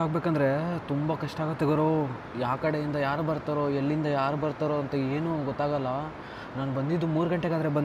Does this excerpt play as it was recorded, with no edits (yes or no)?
yes